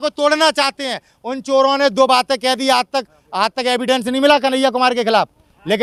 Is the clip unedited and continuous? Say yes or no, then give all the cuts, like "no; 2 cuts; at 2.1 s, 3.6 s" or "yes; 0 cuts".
yes; 0 cuts